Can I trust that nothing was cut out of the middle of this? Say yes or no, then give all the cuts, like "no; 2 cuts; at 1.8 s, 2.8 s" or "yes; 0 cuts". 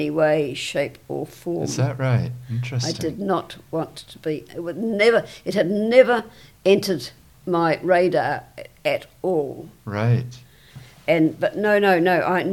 no; 1 cut; at 10.8 s